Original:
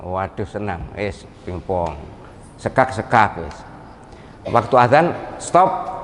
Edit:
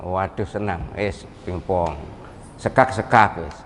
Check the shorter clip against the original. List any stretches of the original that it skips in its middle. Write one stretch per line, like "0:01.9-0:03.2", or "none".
none